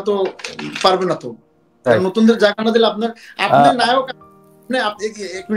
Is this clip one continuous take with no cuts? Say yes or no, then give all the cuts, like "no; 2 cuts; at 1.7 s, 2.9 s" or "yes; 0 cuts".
yes; 0 cuts